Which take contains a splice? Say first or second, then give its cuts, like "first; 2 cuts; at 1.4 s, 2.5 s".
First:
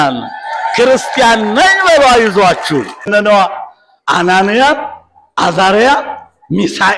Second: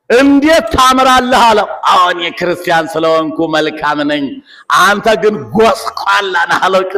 first; 1 cut; at 3.1 s